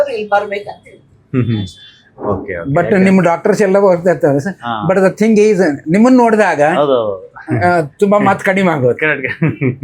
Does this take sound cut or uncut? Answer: uncut